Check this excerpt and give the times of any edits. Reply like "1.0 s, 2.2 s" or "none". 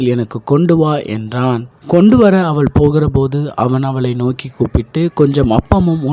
1.7 s